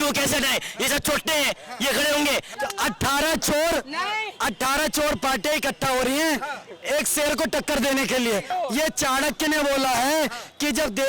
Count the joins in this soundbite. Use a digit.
2